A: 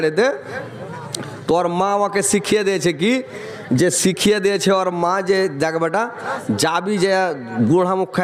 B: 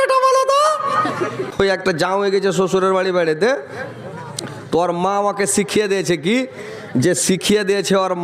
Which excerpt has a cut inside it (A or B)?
B